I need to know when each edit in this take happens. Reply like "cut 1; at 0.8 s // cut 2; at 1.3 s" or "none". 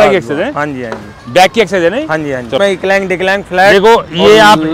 cut 1; at 2.6 s